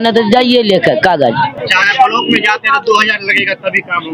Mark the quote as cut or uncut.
uncut